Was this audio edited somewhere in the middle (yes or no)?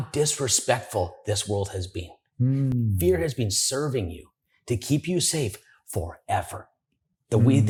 no